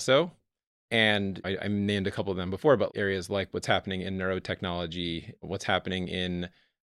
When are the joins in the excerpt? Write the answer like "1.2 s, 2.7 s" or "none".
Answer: 2.9 s